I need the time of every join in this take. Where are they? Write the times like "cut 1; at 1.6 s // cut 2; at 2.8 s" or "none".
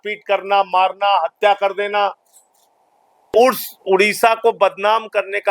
cut 1; at 3.3 s